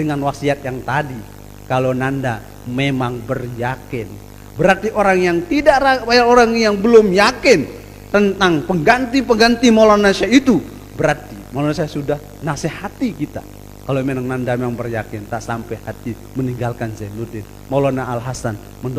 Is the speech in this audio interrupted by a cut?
no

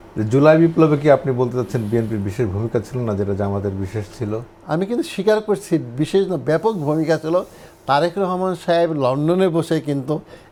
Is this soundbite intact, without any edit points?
yes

